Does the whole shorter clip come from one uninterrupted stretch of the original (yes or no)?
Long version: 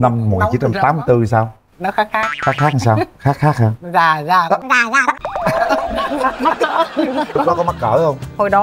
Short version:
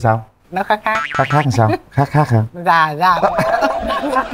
no